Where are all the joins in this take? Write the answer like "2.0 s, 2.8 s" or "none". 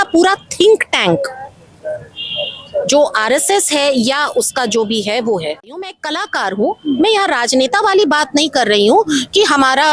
5.9 s